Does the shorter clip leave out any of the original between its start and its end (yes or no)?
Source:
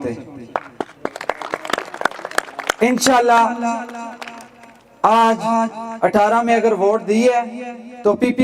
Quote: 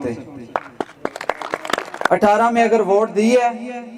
yes